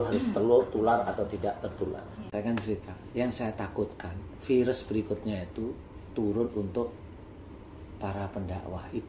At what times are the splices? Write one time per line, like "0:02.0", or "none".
0:02.2